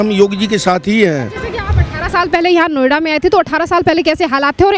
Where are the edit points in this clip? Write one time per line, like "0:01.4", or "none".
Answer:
none

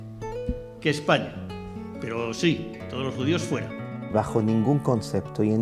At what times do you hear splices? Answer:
0:03.7

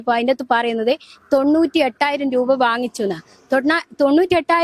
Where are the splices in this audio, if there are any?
none

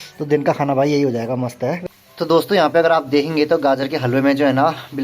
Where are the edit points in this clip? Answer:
0:01.8

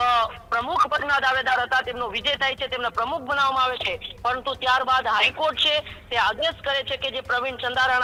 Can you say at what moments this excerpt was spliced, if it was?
none

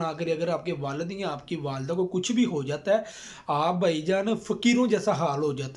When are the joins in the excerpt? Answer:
none

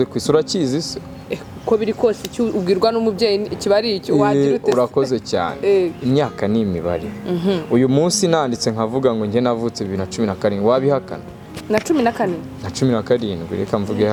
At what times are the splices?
none

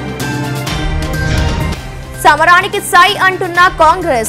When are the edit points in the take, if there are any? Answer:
0:01.7

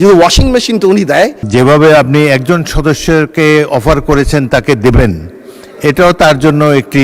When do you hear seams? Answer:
0:01.4

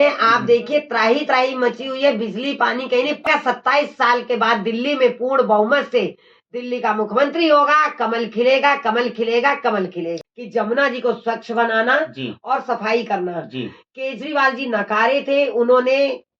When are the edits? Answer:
0:03.3
0:10.3

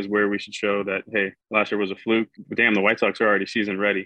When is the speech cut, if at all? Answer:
0:01.4
0:02.4

